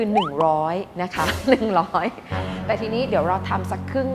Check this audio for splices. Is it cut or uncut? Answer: uncut